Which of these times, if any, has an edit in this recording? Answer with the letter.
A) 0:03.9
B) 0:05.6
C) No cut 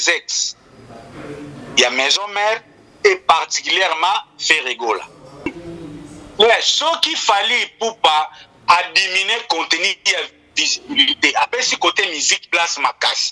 B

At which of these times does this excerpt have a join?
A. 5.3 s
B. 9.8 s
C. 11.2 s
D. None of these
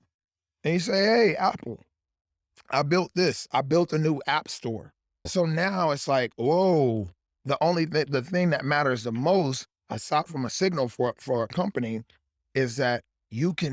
A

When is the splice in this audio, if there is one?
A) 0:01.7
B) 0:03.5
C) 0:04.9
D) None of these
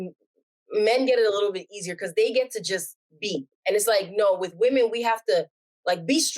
B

